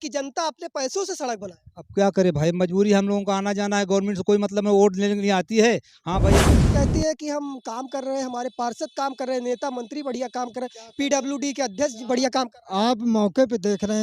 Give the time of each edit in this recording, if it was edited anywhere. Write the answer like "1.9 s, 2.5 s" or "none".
6.5 s